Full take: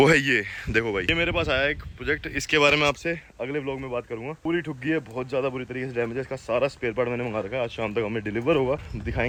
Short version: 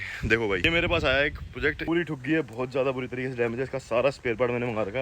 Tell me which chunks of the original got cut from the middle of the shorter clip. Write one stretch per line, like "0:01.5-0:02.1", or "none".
0:02.2-0:04.4

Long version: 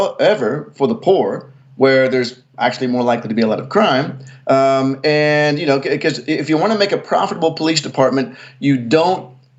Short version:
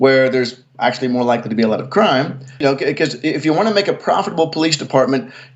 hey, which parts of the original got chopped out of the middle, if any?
0:04.3-0:05.6

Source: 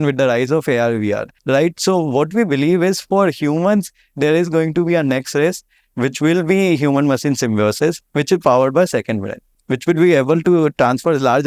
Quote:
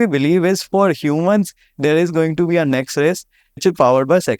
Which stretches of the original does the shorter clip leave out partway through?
0:05.8-0:08.1

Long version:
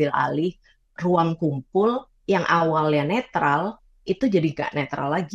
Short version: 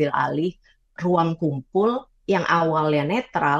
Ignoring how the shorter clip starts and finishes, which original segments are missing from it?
none

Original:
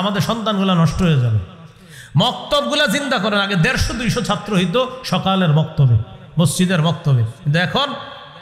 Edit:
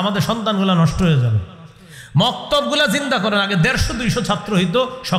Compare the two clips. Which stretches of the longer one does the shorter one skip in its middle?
none

